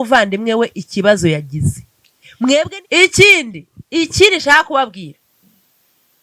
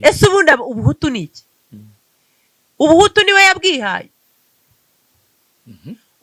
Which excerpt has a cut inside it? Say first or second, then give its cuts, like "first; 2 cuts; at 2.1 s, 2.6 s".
first; 1 cut; at 2.7 s